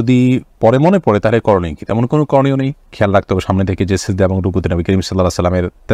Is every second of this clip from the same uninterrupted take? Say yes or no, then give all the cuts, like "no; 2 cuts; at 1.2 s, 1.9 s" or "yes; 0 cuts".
yes; 0 cuts